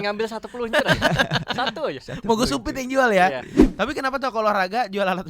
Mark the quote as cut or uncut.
cut